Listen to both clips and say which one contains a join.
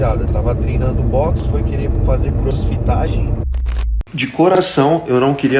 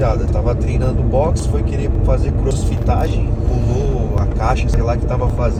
first; 1 cut; at 3.9 s

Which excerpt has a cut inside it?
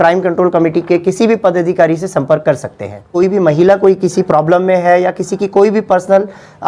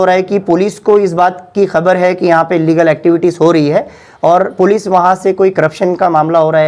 first; 1 cut; at 3.1 s

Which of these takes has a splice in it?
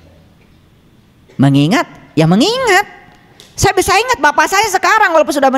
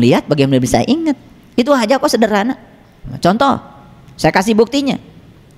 second; 1 cut; at 3.1 s

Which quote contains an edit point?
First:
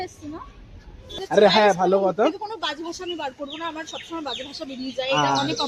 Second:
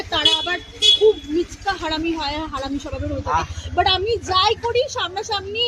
first; 1 cut; at 1.0 s

